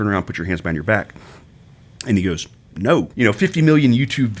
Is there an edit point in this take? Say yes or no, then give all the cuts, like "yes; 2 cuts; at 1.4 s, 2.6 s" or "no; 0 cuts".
yes; 1 cut; at 3.1 s